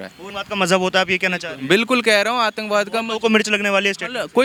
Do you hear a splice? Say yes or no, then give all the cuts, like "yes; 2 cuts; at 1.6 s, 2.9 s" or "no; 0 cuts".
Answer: no; 0 cuts